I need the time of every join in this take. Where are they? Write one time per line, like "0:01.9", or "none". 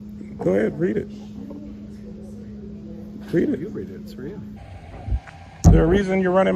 0:04.6

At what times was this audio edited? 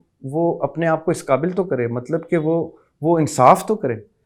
none

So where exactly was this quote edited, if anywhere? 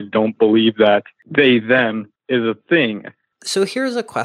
0:01.2
0:02.1
0:03.4

